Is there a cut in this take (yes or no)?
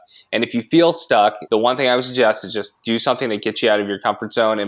yes